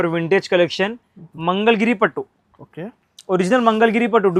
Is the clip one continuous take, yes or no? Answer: yes